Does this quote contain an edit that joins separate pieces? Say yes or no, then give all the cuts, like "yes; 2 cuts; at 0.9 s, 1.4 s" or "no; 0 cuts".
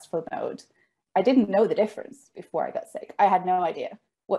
no; 0 cuts